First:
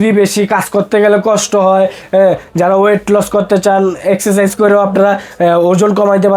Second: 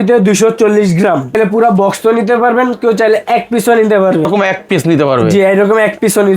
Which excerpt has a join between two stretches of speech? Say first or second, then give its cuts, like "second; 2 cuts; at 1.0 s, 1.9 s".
second; 2 cuts; at 1.3 s, 4.3 s